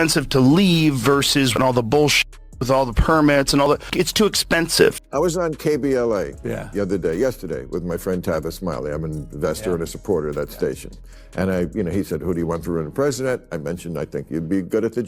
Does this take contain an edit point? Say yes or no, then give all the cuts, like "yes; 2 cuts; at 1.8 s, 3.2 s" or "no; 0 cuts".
yes; 1 cut; at 4.7 s